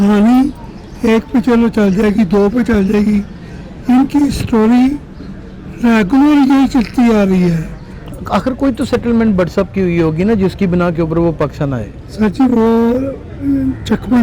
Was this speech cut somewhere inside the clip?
yes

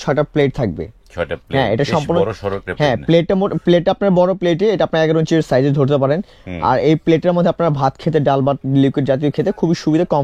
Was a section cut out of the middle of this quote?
no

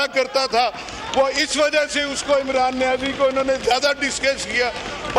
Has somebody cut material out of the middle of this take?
no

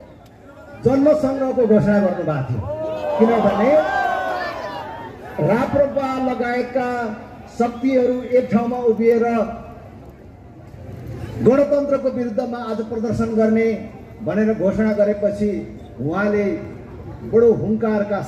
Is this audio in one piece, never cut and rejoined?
yes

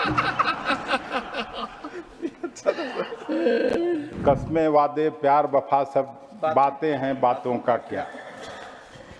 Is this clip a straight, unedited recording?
no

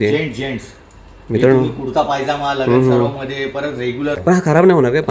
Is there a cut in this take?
yes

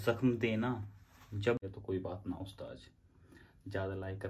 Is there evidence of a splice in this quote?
yes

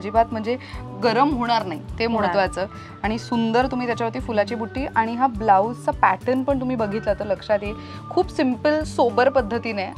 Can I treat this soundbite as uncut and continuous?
yes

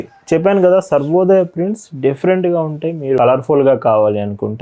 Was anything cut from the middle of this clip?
yes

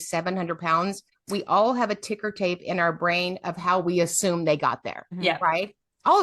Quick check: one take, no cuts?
no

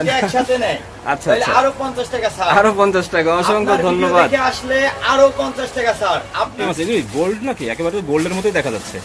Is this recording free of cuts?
no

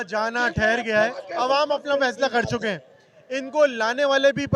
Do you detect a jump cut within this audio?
yes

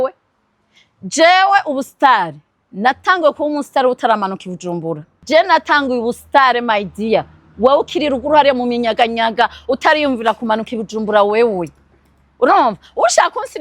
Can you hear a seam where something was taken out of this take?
yes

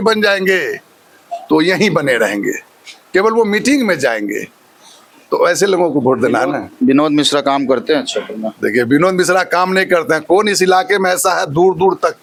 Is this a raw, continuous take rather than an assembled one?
yes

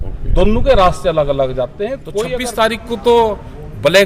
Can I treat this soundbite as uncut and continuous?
no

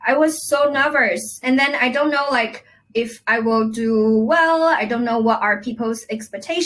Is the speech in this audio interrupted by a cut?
yes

